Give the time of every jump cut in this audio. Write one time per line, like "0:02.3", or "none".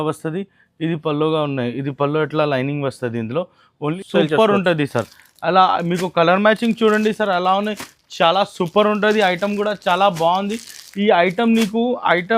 0:04.0